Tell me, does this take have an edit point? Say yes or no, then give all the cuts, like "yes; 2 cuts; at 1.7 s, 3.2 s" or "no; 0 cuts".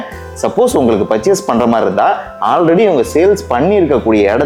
no; 0 cuts